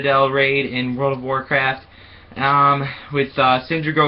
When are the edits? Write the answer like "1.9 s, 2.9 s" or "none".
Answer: 1.9 s